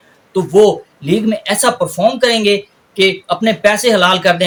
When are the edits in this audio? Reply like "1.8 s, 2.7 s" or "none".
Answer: none

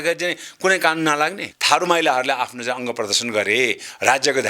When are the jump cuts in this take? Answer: 1.5 s

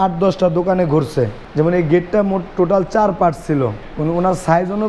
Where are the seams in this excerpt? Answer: 1.4 s, 3.9 s

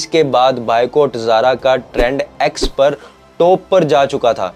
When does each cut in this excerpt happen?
none

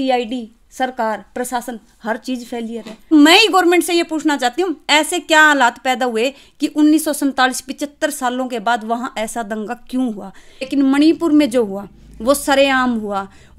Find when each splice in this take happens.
3.1 s, 10.7 s

